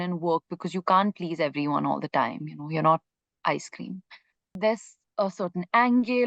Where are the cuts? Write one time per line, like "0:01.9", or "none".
0:04.5